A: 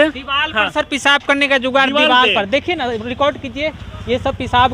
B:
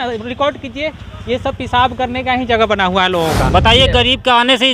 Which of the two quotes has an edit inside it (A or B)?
B